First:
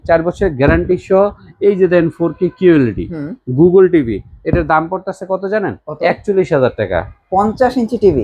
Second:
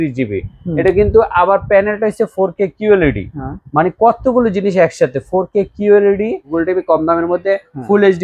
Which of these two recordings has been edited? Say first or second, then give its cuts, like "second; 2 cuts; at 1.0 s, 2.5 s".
second; 1 cut; at 6.5 s